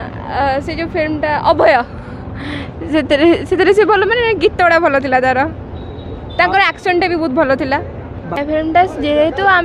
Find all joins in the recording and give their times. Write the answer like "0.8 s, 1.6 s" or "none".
8.4 s